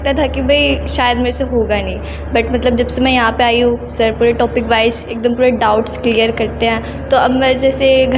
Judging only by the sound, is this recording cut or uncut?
uncut